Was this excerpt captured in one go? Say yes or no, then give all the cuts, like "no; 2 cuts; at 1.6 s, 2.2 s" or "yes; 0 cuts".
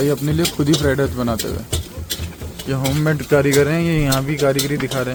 yes; 0 cuts